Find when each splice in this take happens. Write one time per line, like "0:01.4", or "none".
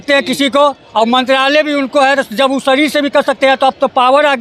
none